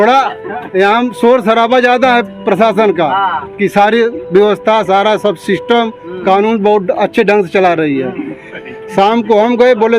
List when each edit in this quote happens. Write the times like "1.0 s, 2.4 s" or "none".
8.5 s